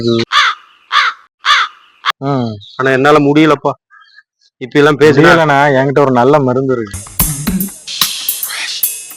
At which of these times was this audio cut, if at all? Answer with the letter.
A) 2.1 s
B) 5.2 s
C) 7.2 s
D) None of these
A